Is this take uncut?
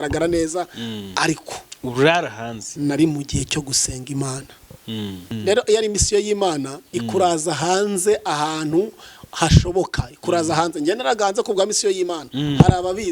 no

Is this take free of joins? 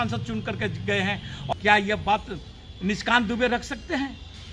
no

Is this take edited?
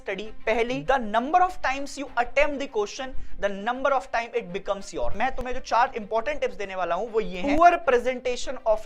yes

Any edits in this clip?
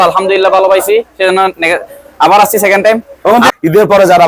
yes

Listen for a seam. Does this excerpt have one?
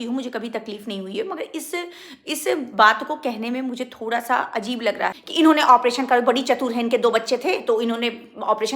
yes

